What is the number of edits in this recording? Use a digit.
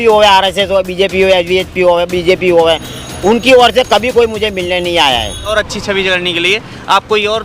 1